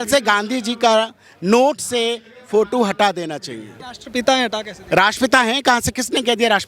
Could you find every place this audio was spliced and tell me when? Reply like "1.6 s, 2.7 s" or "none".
4.0 s